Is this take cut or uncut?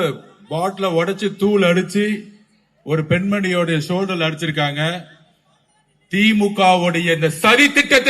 uncut